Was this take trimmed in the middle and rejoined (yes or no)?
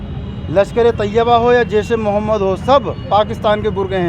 no